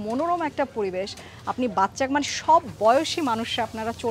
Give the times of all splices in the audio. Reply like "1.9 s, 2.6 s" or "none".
none